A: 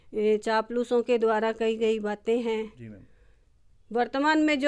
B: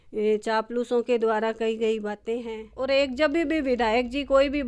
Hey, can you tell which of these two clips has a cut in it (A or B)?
B